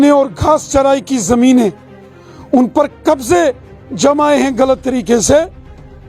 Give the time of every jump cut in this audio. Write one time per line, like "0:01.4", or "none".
none